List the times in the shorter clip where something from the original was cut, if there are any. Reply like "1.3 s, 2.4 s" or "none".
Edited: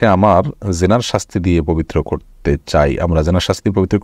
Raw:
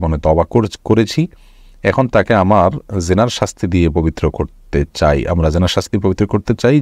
none